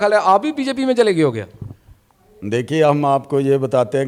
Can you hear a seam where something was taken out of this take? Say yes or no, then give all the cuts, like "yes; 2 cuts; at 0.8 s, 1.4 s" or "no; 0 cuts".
no; 0 cuts